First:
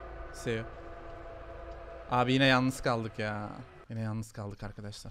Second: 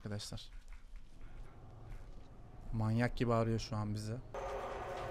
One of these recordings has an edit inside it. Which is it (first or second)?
second